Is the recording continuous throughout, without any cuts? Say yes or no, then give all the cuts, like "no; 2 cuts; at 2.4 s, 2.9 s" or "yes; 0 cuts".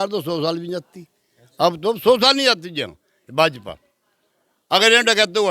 yes; 0 cuts